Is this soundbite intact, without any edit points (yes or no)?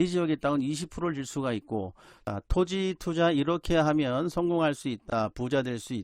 no